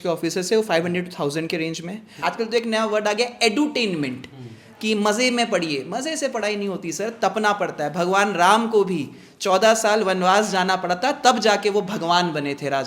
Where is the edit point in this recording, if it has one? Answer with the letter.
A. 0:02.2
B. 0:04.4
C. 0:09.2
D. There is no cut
A